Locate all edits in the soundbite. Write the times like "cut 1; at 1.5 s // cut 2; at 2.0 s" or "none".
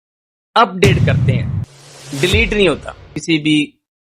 cut 1; at 3.2 s